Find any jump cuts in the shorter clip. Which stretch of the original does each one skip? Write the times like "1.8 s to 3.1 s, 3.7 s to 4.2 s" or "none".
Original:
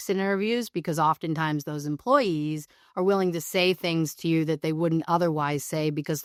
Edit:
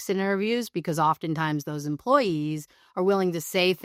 none

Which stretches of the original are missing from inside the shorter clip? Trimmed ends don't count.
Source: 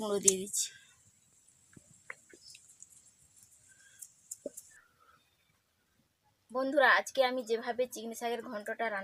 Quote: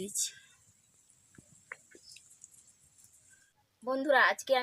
3.8 s to 6.1 s

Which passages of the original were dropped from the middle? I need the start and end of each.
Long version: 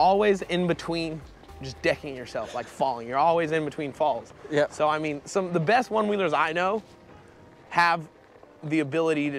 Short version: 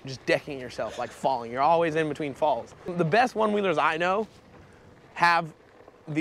4.0 s to 5.0 s

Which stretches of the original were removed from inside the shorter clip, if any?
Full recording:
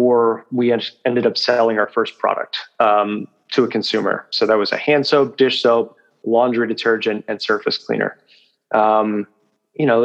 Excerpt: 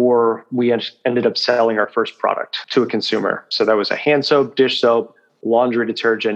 2.5 s to 3.4 s

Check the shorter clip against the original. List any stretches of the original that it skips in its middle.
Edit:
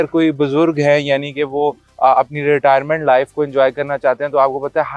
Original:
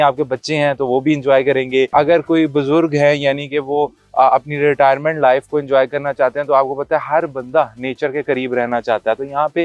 none

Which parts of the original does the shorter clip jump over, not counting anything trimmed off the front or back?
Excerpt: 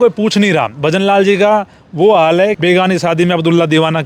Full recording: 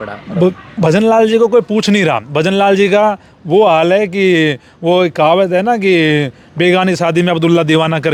4.1 s to 6.5 s

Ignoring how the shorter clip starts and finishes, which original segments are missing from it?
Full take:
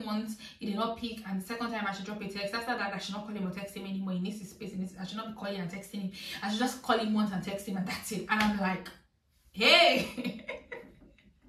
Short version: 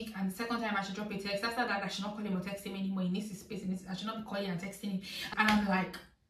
6.4 s to 8.2 s

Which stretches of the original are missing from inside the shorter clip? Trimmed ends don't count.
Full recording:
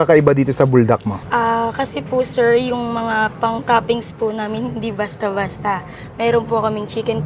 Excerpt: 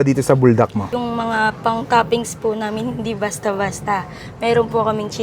1.2 s to 2.7 s

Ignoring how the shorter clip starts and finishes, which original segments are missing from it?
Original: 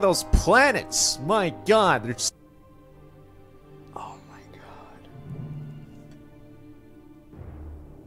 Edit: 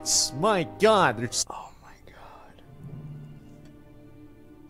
2.3 s to 3.9 s

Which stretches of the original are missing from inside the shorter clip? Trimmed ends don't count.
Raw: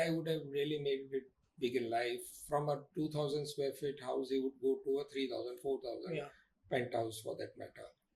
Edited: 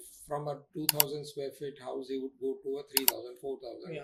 none

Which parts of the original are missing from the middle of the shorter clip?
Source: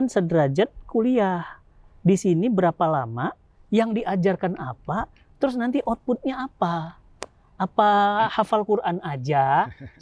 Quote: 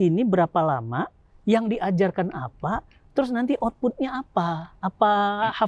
6.9 s to 7.5 s

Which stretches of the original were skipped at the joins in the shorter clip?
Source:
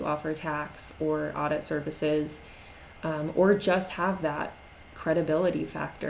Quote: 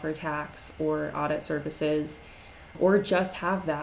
2.9 s to 3.3 s

